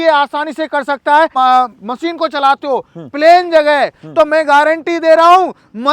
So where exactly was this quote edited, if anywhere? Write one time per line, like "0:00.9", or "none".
0:01.3